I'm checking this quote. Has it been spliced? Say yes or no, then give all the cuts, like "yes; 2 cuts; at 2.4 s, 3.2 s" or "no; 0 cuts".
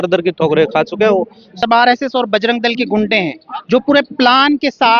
yes; 1 cut; at 1.5 s